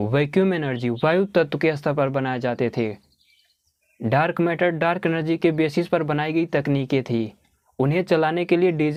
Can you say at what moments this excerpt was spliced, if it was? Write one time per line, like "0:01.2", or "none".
none